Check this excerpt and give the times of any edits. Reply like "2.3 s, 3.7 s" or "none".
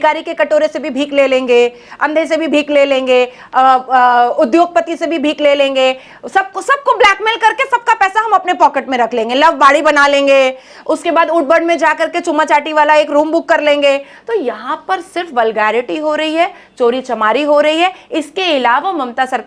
none